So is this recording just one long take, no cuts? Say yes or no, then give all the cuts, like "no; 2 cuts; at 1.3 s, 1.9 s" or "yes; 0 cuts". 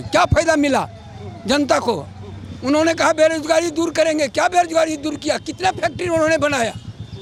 yes; 0 cuts